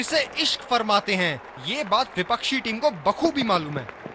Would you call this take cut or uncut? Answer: uncut